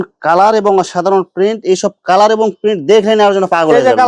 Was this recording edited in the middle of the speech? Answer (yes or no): no